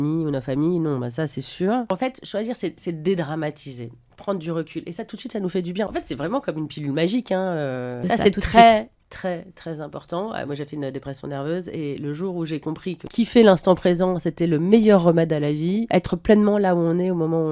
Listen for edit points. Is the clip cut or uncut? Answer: cut